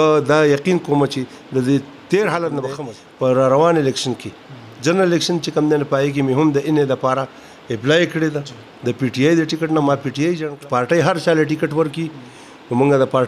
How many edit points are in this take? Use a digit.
2